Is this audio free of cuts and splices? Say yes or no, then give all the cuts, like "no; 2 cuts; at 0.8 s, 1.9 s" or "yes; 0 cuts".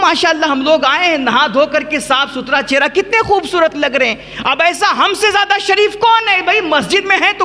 yes; 0 cuts